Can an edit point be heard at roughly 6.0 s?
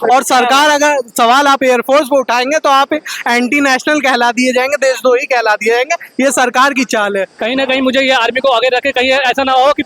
no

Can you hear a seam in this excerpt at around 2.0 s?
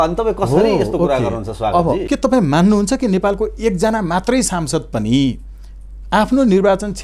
yes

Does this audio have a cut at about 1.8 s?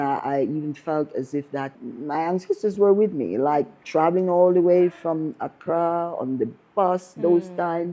yes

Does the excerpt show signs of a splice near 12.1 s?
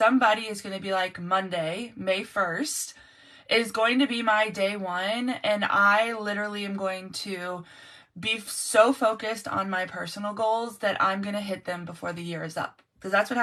no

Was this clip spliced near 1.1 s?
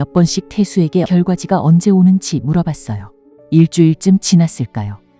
yes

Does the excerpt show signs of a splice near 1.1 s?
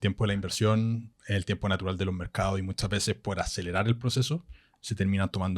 yes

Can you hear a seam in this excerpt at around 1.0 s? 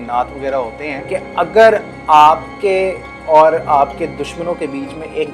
yes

